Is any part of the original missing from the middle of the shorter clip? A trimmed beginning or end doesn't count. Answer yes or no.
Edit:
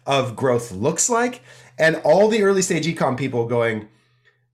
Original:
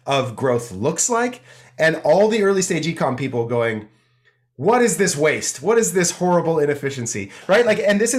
no